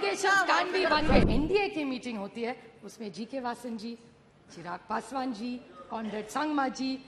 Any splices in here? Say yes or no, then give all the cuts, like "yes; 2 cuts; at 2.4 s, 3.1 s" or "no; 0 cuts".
yes; 1 cut; at 1.2 s